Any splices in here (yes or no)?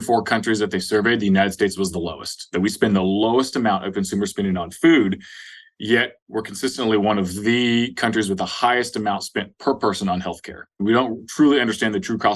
yes